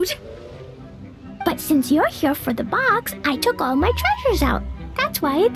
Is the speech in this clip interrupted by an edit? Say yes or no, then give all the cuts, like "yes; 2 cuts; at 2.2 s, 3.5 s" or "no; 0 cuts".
no; 0 cuts